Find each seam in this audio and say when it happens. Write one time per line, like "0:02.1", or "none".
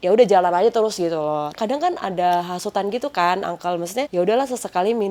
0:01.6
0:04.1

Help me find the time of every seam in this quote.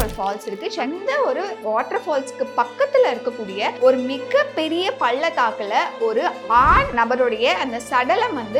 0:00.8
0:03.7
0:06.9

